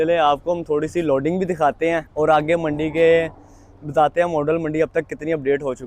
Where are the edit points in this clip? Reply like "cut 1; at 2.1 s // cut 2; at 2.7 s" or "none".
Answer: cut 1; at 2.1 s